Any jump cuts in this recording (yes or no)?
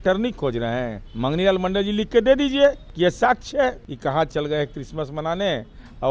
yes